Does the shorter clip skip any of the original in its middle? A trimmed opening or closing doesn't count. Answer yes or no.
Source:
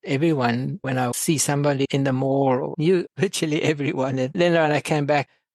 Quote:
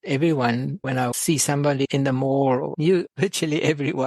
no